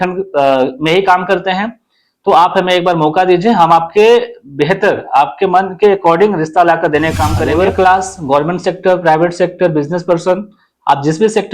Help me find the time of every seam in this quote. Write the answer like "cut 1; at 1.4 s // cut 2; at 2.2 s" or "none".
cut 1; at 7.4 s